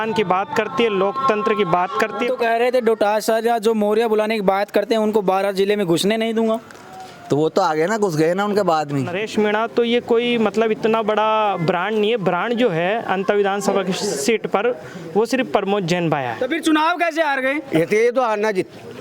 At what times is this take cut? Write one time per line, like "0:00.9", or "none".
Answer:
0:02.3
0:09.2
0:16.4